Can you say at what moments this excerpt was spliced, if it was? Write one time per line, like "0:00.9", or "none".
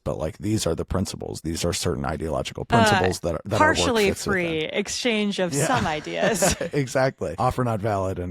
0:07.3